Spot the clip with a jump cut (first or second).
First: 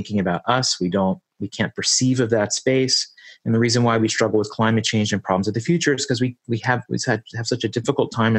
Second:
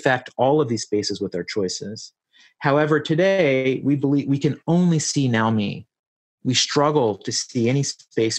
second